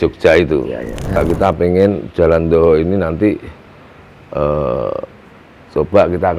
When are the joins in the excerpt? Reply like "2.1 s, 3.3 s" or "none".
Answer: 1.2 s